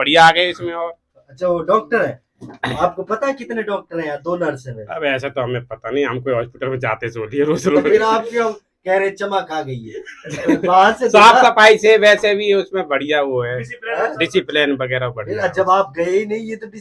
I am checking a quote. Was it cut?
no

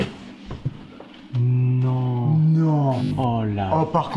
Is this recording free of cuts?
no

